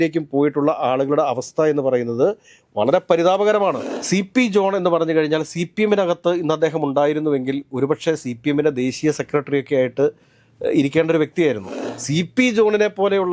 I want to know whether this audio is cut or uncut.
cut